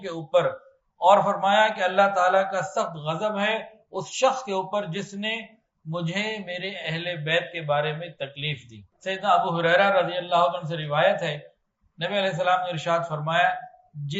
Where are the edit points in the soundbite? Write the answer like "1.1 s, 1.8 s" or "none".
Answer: 8.9 s